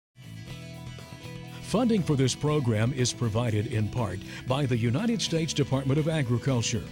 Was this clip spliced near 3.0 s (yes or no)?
no